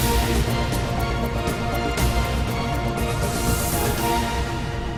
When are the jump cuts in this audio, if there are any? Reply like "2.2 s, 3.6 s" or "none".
none